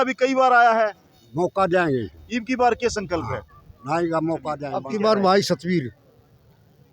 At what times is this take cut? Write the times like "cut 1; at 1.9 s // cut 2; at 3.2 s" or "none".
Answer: cut 1; at 4.7 s